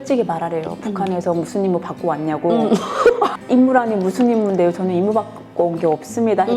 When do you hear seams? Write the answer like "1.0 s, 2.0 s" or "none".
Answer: 3.4 s